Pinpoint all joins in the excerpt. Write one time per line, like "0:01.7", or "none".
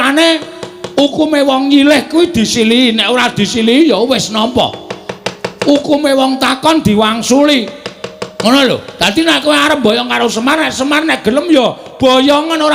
none